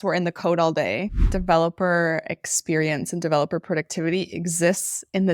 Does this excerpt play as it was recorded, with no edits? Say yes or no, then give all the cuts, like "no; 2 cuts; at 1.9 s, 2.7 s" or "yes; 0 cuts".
no; 1 cut; at 1.3 s